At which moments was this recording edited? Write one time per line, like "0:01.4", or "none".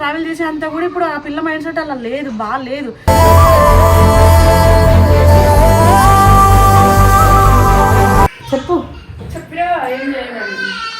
0:08.4